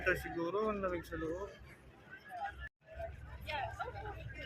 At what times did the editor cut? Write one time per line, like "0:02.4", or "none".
0:02.8